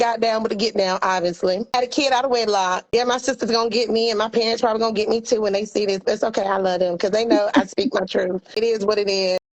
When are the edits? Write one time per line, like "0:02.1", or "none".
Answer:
0:01.7
0:02.8
0:08.6